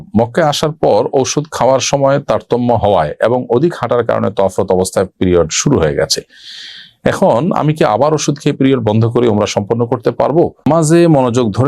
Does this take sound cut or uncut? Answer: cut